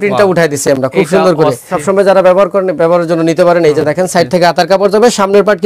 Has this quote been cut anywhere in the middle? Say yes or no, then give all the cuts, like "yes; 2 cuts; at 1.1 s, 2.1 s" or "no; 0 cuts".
yes; 1 cut; at 1.7 s